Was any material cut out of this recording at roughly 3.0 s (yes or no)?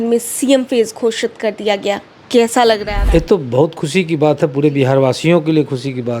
yes